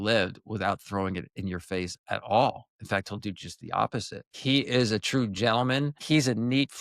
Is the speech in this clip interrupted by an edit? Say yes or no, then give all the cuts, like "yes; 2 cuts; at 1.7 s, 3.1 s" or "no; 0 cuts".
yes; 2 cuts; at 4.2 s, 6.0 s